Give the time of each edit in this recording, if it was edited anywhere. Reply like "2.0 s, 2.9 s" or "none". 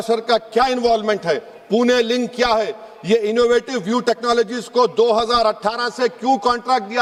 none